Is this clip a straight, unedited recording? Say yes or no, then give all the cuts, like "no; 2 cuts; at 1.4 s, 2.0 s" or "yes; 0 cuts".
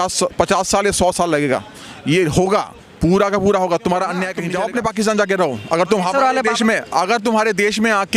no; 1 cut; at 4.4 s